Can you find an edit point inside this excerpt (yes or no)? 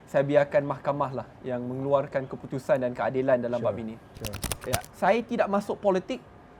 yes